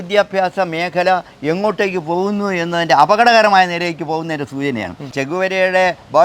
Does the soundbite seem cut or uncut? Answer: cut